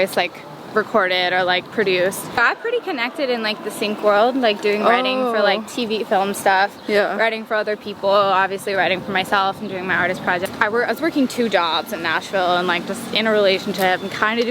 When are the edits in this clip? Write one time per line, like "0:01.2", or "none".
0:02.3
0:10.5